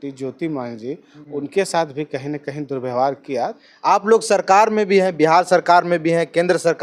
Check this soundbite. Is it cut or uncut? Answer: cut